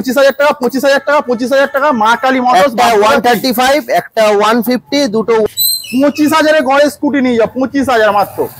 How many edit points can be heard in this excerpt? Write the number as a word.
one